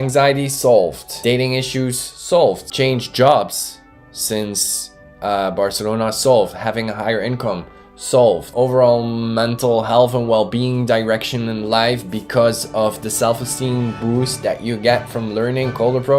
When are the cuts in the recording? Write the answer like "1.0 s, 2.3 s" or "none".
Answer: 1.1 s, 2.7 s, 8.5 s